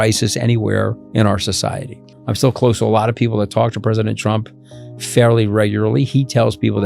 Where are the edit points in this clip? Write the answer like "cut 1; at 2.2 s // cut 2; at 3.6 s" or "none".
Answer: cut 1; at 1.0 s // cut 2; at 2.1 s